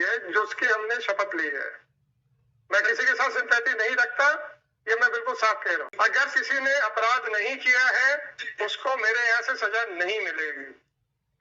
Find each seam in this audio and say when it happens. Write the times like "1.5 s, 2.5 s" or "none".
5.9 s